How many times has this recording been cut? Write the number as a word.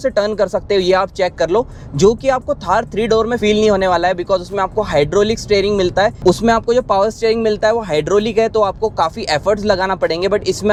zero